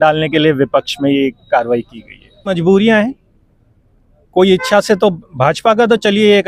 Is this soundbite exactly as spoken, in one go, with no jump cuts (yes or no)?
no